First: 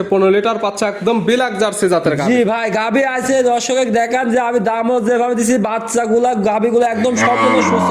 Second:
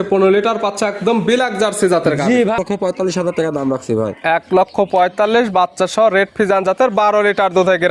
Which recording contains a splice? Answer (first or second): second